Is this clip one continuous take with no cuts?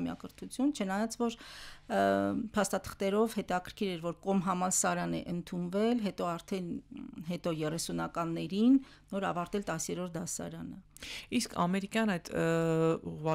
yes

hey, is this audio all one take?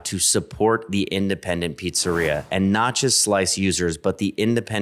yes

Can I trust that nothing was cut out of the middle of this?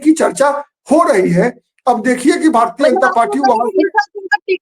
yes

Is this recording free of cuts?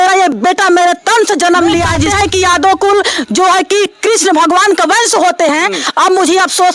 no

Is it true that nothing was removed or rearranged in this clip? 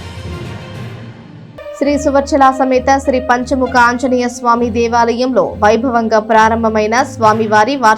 yes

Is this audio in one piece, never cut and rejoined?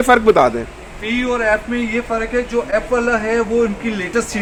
yes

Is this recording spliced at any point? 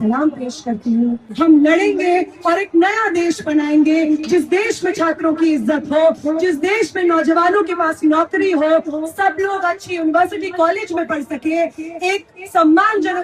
yes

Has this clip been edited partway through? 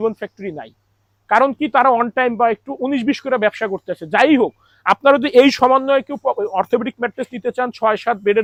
no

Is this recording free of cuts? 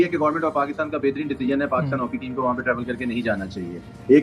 yes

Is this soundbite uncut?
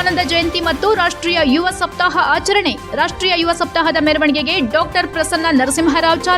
yes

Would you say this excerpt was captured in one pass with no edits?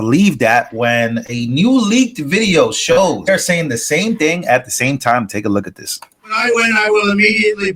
no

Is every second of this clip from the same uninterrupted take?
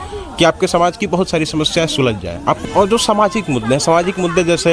no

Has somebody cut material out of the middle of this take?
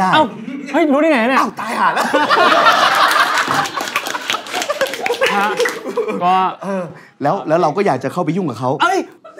no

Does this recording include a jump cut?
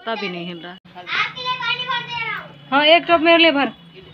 yes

